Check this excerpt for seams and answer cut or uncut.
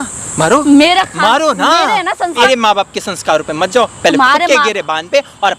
cut